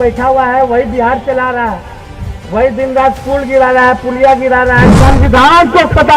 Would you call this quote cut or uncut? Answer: cut